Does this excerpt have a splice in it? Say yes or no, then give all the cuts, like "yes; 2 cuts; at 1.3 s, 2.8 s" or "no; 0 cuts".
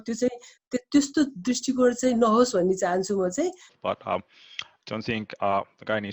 yes; 1 cut; at 3.7 s